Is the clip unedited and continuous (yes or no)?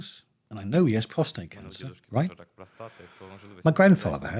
yes